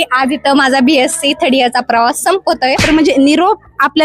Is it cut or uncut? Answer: cut